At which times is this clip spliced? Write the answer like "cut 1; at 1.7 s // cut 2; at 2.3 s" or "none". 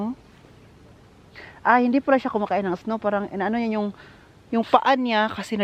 none